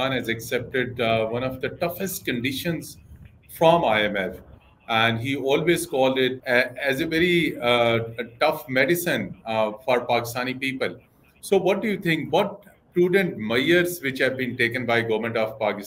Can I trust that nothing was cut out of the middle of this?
yes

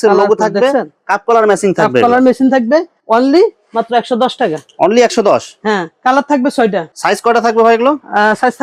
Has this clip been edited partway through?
no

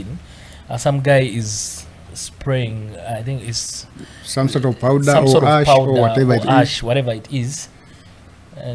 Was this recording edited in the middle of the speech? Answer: no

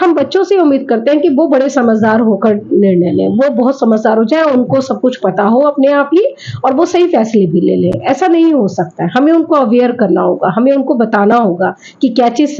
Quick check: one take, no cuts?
yes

